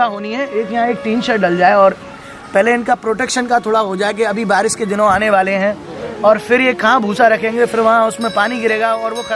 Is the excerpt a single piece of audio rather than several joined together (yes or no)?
yes